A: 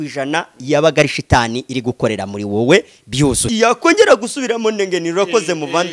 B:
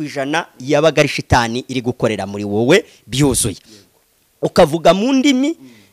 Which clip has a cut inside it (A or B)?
A